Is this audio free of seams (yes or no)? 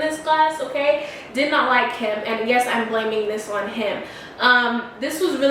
yes